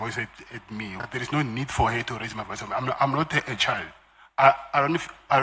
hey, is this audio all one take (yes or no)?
no